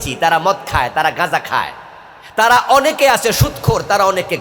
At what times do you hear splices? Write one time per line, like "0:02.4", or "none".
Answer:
none